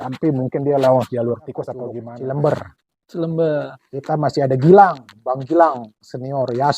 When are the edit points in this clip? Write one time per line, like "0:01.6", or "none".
0:01.9